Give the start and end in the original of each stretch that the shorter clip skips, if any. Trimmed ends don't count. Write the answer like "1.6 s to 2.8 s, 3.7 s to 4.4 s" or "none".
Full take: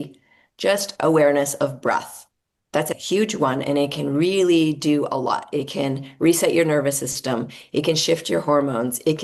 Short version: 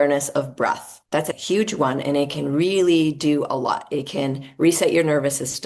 2.2 s to 2.5 s